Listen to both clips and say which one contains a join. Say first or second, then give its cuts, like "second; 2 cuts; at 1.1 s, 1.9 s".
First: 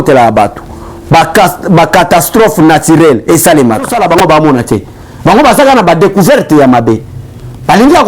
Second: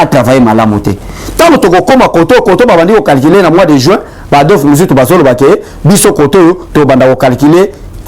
first; 1 cut; at 3.9 s